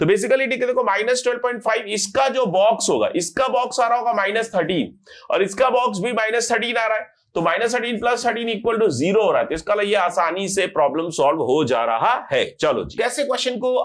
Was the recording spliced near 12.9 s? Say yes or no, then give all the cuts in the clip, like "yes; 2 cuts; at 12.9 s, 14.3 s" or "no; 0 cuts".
yes; 1 cut; at 12.9 s